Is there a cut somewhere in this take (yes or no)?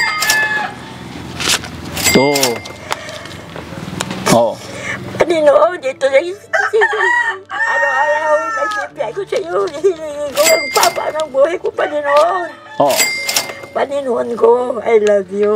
no